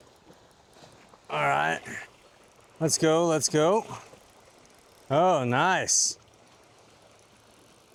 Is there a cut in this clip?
no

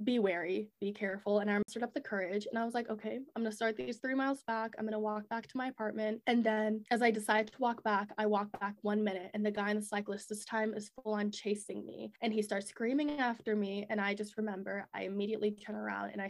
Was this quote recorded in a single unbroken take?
no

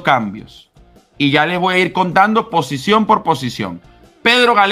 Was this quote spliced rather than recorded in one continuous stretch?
no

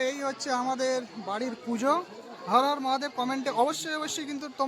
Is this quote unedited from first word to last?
yes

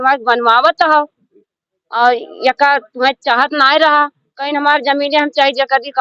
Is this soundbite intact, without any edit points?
yes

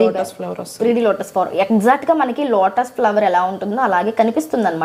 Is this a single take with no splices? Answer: yes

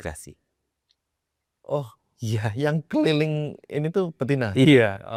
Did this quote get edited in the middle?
no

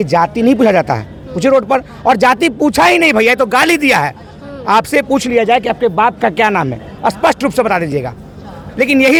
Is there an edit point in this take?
no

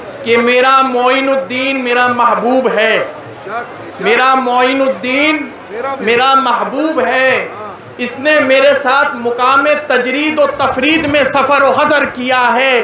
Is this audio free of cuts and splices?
yes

